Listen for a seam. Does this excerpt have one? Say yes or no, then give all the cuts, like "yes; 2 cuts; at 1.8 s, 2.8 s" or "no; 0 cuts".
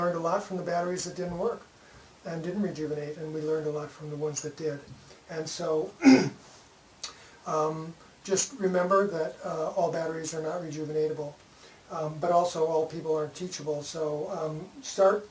yes; 1 cut; at 3.9 s